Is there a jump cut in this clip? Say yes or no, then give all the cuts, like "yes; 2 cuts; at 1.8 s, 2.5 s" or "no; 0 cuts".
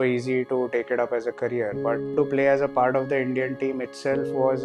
yes; 1 cut; at 2.1 s